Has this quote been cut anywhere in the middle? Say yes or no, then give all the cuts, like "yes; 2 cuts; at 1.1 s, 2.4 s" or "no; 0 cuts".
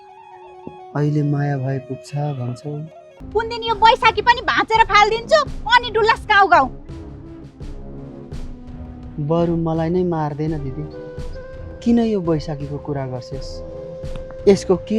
yes; 1 cut; at 3.1 s